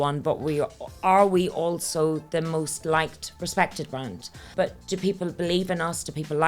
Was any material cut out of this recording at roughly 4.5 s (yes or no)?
yes